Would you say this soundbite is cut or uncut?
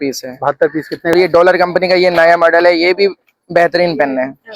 cut